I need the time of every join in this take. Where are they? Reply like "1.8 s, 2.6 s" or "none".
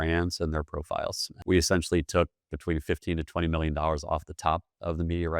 1.3 s